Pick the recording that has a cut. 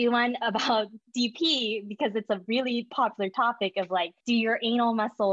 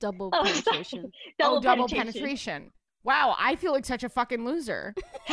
first; 1 cut; at 4.1 s

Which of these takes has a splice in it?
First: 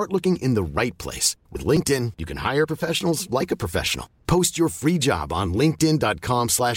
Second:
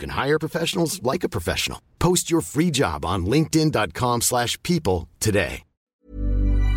second; 1 cut; at 5.7 s

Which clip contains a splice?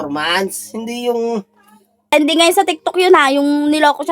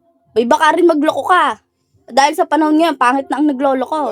first; 1 cut; at 2.1 s

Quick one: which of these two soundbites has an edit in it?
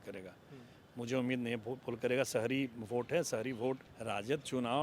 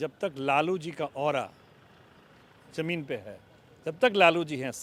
first; 1 cut; at 3.9 s

